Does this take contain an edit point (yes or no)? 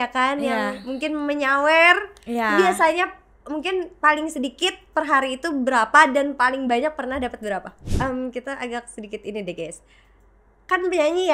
yes